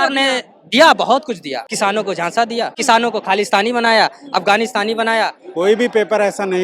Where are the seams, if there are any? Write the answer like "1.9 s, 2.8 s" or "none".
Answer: 1.6 s, 2.8 s, 5.4 s